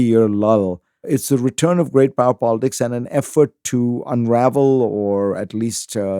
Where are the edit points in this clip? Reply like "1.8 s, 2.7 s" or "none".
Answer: 1.1 s